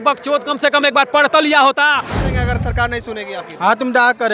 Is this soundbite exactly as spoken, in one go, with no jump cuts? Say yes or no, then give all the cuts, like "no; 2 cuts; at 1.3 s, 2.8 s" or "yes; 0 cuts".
no; 1 cut; at 2.3 s